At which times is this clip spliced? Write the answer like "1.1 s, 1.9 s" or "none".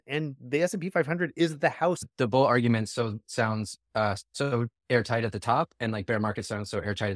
2.1 s